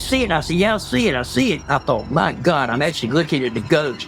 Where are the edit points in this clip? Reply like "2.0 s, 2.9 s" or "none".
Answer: none